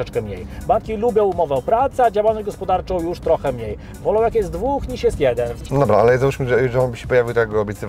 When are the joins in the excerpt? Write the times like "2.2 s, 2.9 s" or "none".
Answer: 5.5 s